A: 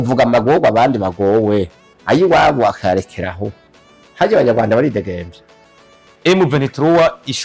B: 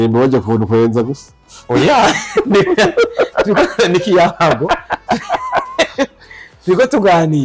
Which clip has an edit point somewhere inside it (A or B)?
A